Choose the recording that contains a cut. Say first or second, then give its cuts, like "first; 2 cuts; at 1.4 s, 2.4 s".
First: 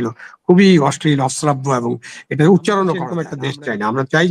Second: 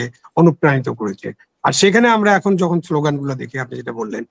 first; 1 cut; at 3.3 s